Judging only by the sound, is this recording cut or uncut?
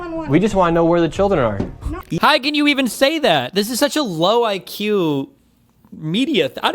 cut